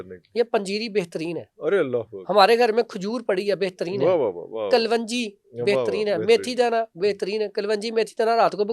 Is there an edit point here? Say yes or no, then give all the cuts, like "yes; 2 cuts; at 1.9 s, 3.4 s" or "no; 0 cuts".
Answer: no; 0 cuts